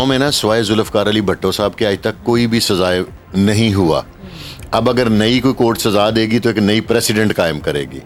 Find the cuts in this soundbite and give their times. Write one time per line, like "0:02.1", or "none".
none